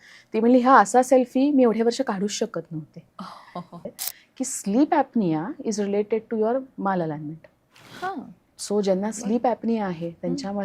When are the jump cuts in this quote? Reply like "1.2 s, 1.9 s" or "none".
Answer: 4.0 s